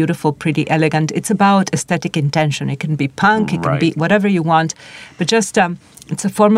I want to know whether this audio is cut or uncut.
uncut